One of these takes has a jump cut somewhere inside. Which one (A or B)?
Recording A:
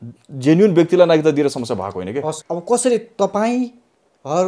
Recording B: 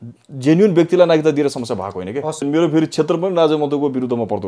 B